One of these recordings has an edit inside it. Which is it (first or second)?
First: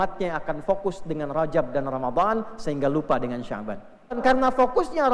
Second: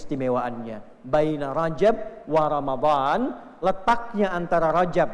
first